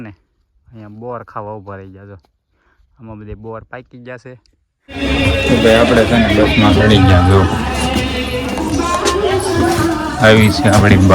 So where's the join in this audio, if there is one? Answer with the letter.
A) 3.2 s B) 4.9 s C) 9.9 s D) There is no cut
B